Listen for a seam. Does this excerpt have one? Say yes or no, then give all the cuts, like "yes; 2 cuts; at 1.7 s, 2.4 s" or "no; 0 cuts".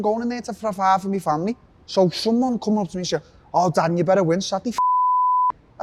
no; 0 cuts